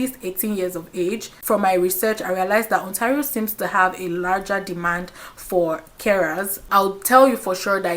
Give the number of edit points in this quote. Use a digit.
2